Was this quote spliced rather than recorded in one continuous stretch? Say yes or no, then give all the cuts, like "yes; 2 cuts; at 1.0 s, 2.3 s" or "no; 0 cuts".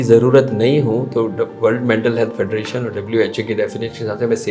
no; 0 cuts